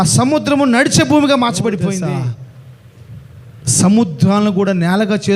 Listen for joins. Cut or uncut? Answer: cut